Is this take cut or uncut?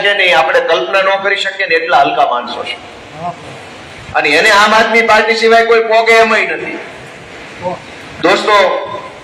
uncut